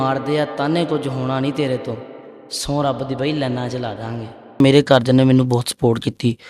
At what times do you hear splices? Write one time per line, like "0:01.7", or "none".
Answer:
0:04.6